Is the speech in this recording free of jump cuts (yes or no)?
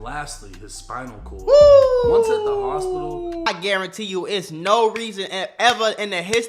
no